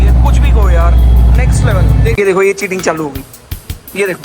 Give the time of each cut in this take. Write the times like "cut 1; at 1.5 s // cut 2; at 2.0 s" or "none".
cut 1; at 2.2 s